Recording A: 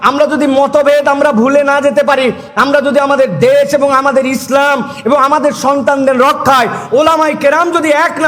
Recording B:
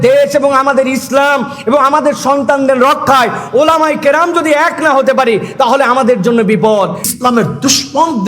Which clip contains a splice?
B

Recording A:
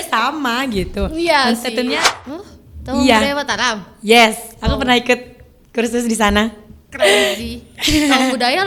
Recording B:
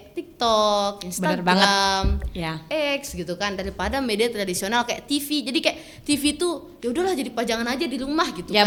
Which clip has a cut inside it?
A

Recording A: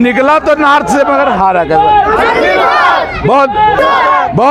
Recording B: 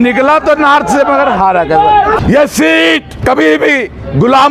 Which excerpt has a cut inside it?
B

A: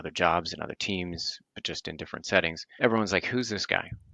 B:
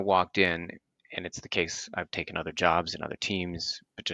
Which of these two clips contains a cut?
A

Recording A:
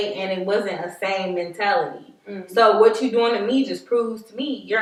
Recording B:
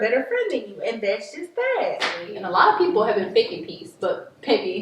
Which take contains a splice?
B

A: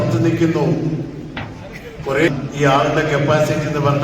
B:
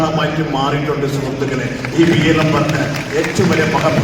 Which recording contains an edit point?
A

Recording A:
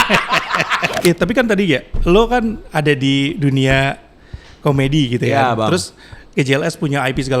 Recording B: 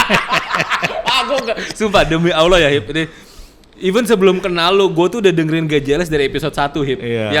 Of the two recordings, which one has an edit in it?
A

